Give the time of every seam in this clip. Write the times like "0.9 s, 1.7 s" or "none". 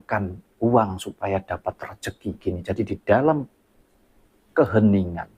2.3 s